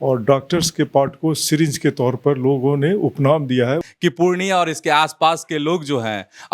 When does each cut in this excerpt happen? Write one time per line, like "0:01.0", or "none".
0:03.8